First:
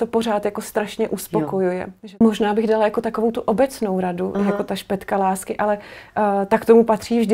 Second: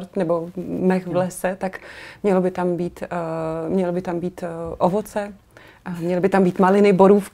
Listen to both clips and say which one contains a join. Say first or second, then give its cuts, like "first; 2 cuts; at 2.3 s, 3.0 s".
first; 1 cut; at 2.2 s